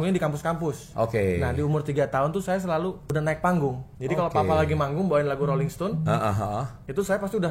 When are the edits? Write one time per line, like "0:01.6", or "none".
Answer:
0:00.8
0:03.0
0:03.9